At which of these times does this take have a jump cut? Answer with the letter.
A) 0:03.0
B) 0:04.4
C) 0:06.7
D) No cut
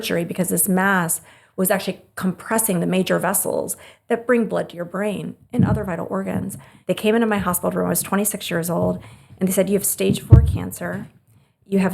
C